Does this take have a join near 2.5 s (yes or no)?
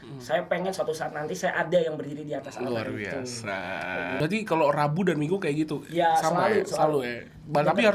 no